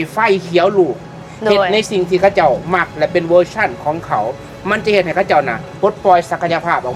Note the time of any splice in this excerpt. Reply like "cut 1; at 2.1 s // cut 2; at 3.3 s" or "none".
none